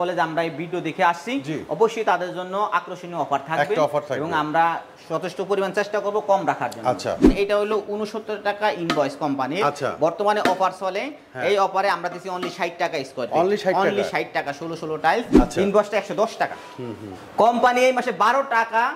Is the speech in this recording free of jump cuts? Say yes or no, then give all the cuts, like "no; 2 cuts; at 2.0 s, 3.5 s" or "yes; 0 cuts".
no; 2 cuts; at 7.2 s, 15.4 s